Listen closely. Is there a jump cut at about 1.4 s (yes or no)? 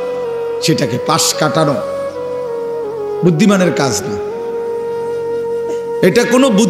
no